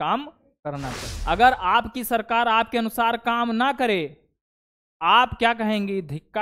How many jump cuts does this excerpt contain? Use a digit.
1